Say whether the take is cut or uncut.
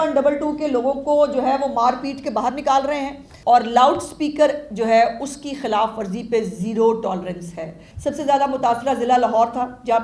cut